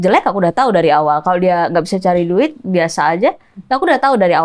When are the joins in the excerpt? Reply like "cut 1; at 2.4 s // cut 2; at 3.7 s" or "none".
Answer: none